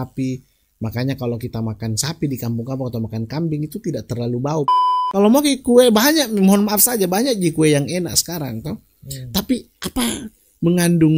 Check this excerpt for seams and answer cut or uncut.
cut